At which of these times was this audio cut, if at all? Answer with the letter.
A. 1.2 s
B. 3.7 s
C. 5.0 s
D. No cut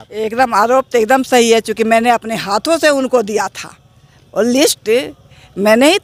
D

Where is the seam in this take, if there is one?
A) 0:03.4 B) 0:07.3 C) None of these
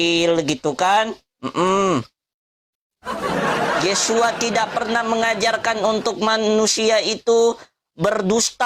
C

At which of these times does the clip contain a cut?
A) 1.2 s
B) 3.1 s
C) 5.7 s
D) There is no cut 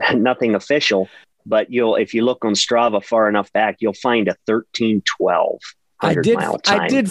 A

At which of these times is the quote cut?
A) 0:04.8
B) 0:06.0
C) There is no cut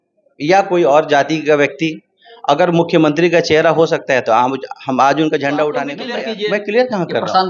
B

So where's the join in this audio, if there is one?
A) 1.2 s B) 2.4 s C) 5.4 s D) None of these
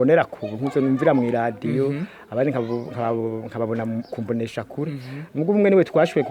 D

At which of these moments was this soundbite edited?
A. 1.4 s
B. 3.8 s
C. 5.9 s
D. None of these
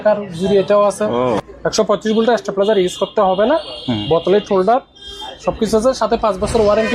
A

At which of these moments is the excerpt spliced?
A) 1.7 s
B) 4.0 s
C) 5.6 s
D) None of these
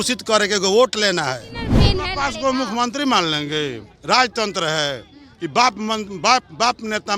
A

